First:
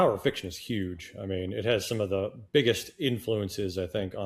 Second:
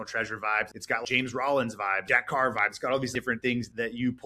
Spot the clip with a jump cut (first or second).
second